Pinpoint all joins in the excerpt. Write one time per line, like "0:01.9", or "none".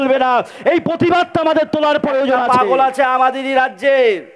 0:02.4